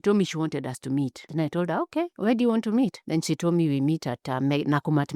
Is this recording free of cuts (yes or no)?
yes